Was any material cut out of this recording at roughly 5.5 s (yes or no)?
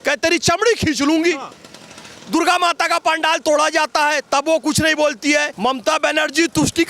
yes